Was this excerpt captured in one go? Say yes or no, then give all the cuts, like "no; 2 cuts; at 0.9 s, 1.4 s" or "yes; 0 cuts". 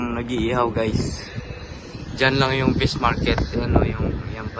yes; 0 cuts